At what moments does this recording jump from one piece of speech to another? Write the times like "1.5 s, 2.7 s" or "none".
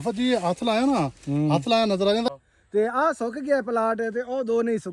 2.3 s